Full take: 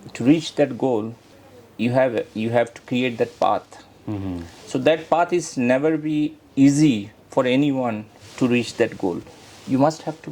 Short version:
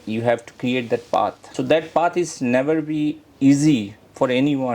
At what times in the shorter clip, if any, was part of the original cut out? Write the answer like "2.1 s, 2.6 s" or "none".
1.4 s